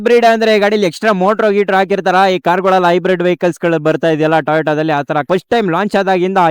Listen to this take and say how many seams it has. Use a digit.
1